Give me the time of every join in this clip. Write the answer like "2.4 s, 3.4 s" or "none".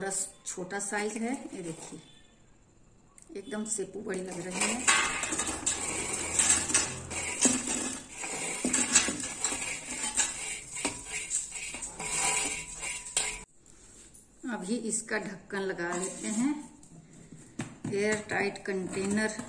13.5 s